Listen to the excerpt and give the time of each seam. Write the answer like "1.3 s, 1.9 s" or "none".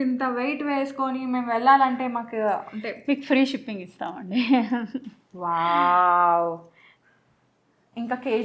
none